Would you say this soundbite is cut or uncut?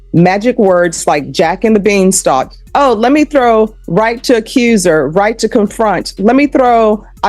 uncut